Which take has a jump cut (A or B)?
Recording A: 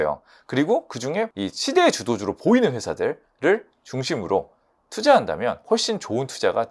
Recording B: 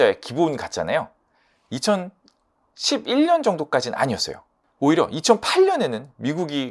A